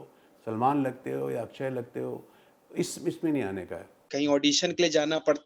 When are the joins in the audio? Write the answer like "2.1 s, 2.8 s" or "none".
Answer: 4.0 s